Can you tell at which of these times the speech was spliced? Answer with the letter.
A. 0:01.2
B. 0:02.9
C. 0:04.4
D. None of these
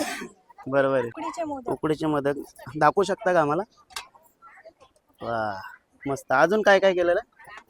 A